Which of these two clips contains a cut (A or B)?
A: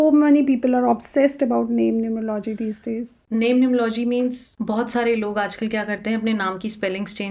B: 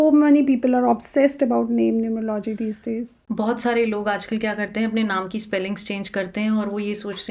B